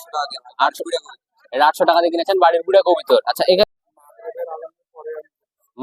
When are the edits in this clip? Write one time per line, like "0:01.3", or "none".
0:03.7